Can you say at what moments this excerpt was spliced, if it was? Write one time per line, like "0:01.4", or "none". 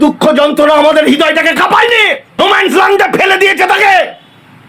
0:02.4